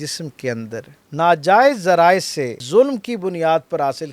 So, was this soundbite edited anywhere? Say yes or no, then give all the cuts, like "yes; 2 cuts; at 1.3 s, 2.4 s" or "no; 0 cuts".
yes; 2 cuts; at 1.0 s, 2.6 s